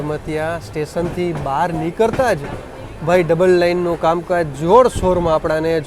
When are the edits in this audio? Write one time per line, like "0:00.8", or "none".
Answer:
none

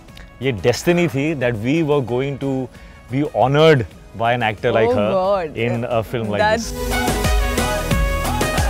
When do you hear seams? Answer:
0:06.7

